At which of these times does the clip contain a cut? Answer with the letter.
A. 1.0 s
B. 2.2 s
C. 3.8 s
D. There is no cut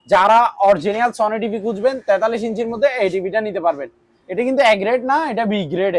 D